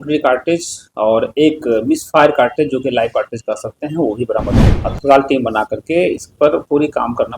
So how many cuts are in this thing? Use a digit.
1